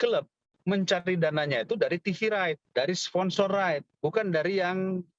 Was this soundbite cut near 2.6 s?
yes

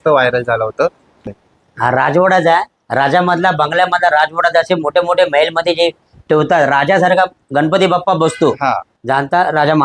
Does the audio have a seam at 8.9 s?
yes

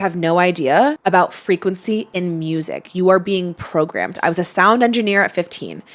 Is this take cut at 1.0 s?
yes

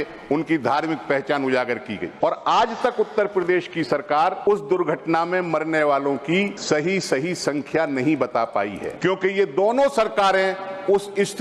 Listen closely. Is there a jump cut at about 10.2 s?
no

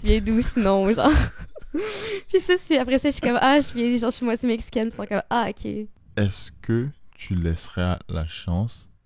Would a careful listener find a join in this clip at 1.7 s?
no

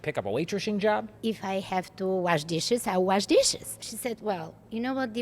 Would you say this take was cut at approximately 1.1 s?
yes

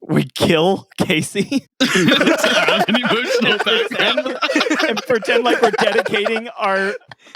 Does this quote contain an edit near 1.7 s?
no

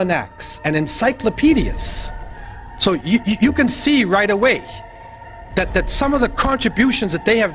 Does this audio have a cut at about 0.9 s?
no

